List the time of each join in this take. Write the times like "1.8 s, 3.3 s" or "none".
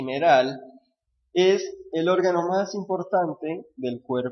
1.7 s